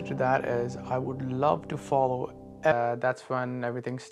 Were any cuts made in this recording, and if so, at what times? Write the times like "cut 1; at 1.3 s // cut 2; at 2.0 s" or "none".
none